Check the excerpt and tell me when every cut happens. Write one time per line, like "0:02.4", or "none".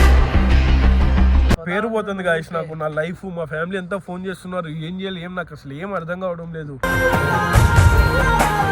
0:01.6